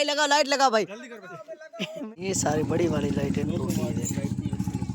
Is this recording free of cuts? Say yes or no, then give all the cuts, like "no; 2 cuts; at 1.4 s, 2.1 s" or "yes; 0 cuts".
no; 1 cut; at 2.1 s